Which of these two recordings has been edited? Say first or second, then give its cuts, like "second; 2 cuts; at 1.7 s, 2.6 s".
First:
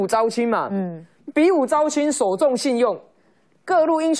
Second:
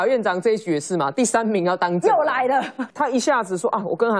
second; 1 cut; at 2.8 s